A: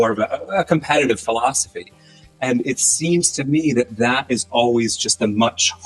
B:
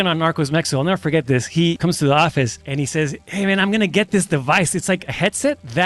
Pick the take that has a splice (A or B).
B